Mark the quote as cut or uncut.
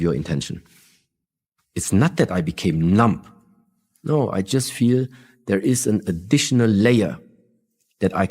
cut